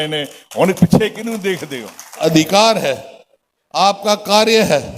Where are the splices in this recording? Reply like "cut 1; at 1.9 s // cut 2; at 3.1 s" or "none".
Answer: cut 1; at 2.2 s